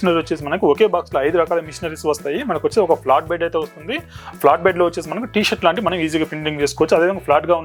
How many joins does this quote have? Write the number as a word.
zero